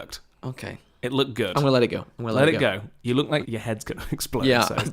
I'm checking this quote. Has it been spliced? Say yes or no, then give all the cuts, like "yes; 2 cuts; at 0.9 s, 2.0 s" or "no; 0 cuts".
yes; 1 cut; at 3.4 s